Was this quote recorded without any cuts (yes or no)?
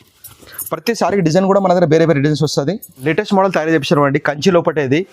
no